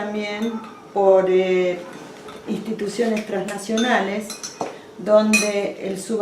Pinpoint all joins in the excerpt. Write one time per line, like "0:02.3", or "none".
0:02.1